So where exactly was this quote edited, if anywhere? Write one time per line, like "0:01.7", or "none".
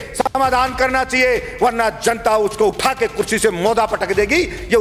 none